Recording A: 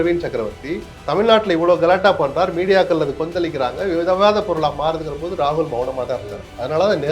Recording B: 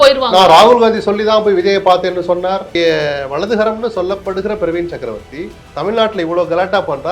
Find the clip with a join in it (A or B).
B